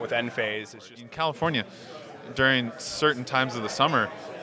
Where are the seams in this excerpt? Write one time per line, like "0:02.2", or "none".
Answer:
0:00.9